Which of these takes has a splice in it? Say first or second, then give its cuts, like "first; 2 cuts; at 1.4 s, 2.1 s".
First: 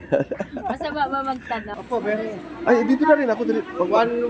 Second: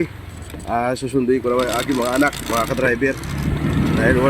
first; 1 cut; at 1.7 s